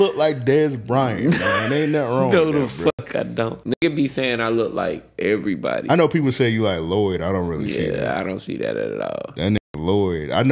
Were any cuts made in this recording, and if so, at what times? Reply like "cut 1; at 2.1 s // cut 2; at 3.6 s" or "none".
cut 1; at 3.6 s

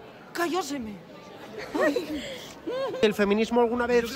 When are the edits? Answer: cut 1; at 3.0 s

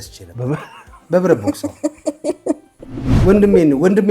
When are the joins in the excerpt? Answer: cut 1; at 3.2 s

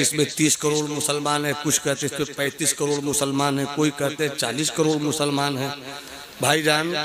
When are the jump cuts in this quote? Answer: none

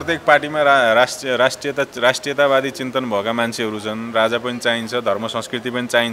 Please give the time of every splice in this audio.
none

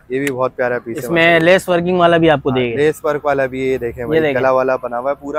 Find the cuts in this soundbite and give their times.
none

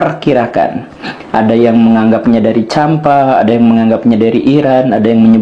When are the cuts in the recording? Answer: none

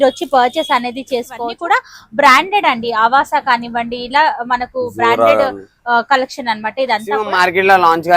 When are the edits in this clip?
cut 1; at 1.5 s // cut 2; at 7.3 s

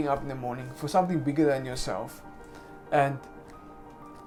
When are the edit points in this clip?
none

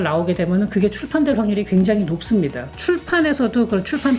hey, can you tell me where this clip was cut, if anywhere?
cut 1; at 2.7 s

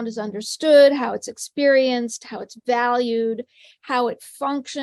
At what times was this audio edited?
none

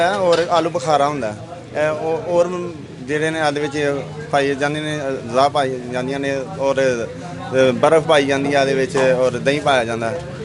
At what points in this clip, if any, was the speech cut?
none

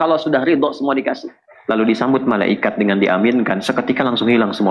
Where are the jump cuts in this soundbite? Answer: cut 1; at 1.5 s

